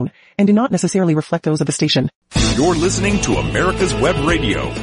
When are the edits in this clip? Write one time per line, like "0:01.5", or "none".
0:02.2

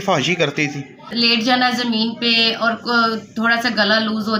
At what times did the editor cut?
0:01.1

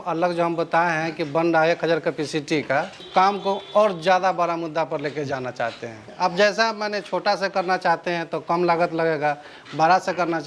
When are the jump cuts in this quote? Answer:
0:03.0
0:06.1

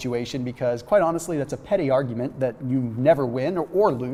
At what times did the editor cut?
none

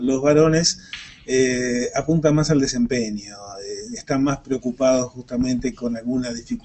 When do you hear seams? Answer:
0:01.5

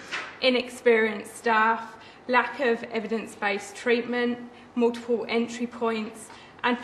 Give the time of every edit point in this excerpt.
0:01.5

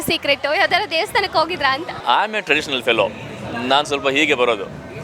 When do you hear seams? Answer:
0:01.9

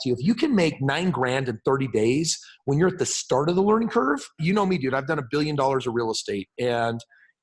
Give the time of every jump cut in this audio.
0:04.3

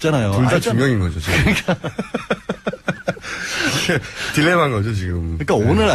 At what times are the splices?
0:01.2

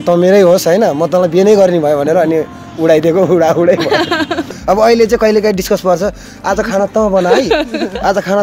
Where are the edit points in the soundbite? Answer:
0:04.4

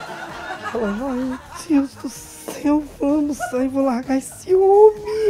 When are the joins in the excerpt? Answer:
none

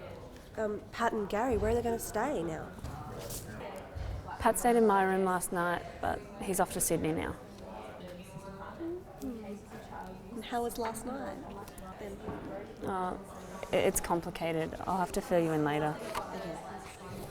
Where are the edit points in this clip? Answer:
none

